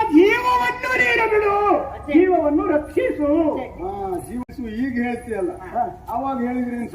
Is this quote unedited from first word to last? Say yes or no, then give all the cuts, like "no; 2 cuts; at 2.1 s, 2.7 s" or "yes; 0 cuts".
no; 1 cut; at 4.5 s